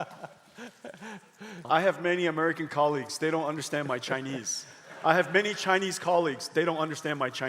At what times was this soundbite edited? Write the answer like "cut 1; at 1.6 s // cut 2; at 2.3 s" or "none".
cut 1; at 1.6 s